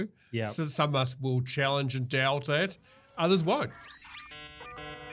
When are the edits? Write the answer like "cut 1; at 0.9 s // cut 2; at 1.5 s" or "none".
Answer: cut 1; at 4.2 s